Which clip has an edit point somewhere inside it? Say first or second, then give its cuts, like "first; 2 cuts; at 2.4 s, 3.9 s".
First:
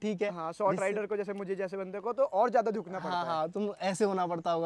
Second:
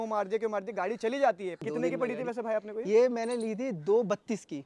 second; 1 cut; at 1.6 s